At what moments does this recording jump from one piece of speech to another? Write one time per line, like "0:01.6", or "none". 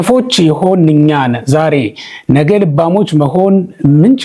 none